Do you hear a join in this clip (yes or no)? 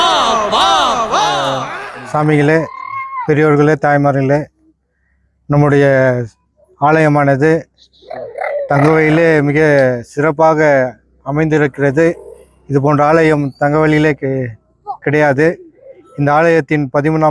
yes